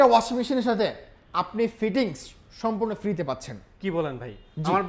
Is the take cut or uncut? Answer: uncut